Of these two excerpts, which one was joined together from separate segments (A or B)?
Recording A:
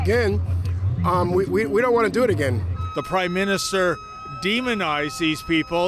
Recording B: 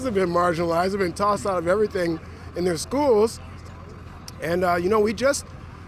A